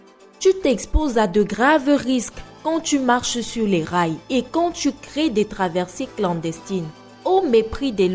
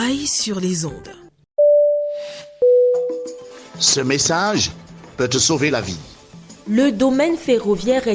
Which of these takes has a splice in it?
second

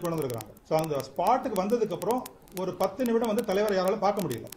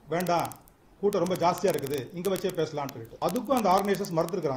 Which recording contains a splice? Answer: second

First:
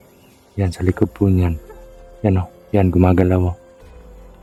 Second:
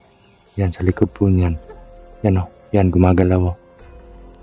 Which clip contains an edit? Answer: second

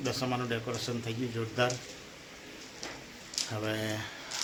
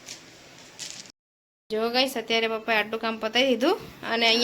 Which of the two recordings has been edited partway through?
second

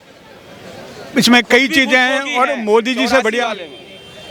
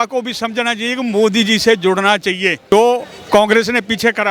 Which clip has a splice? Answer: second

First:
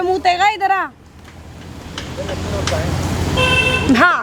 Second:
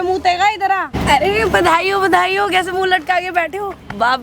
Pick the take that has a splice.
second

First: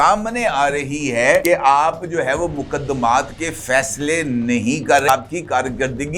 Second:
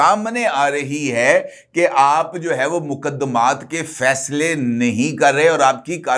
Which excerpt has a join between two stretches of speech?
first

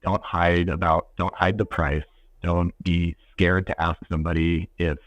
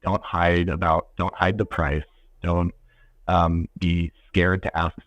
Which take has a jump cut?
first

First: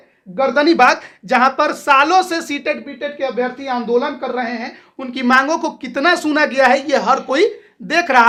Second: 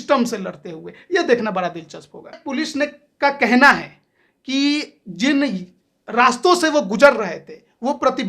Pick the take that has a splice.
second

